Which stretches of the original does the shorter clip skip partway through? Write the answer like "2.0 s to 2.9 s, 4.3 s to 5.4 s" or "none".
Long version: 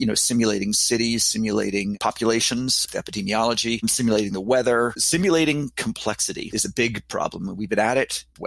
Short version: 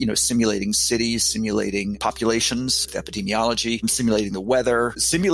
none